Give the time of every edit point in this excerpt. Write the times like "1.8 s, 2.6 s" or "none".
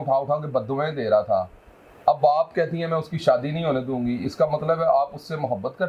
none

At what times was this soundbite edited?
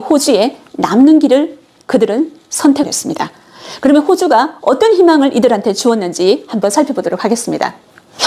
none

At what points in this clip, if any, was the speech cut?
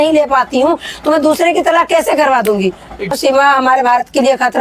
3.2 s

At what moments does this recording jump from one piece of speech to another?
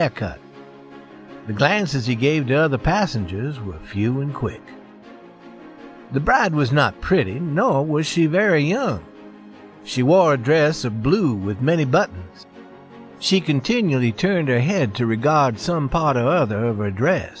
none

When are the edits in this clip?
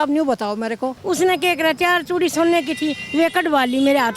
0.9 s

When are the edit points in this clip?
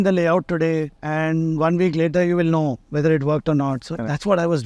1.0 s

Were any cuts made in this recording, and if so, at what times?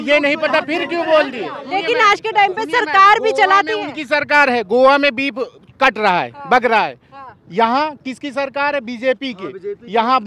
1.6 s

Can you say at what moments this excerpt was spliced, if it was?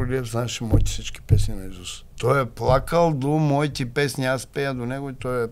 2.0 s

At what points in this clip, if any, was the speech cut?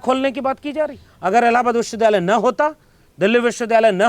1.1 s

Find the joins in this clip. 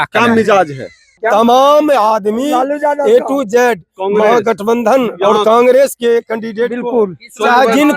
1.1 s

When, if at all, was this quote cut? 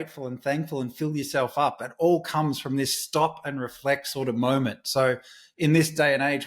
5.4 s

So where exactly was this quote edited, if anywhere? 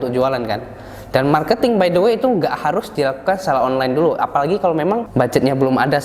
5.1 s

